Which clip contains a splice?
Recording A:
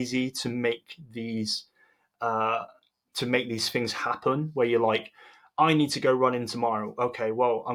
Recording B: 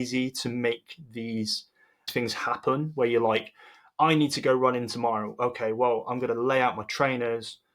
B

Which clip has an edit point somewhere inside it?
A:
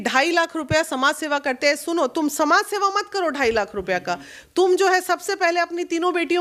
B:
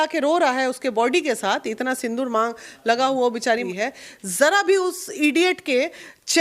B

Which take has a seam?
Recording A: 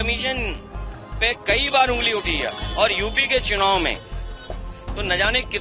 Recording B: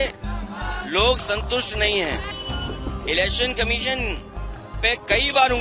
B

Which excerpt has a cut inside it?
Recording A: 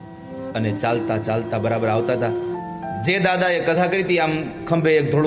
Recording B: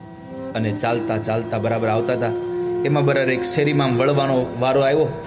A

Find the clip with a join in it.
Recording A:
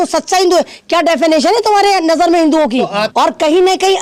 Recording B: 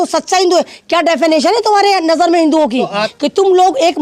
B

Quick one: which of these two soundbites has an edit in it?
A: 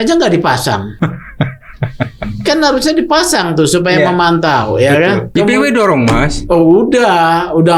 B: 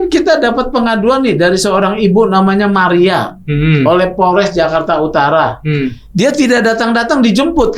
A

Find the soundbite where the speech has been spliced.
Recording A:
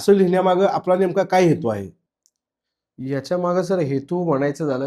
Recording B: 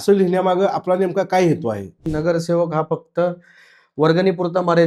B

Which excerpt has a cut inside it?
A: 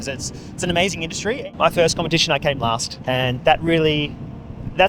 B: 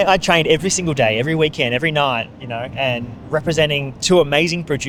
A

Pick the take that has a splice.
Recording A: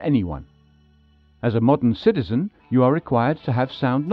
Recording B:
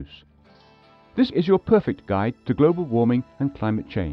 A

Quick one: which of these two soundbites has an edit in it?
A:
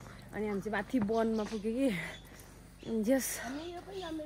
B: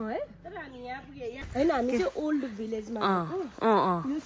B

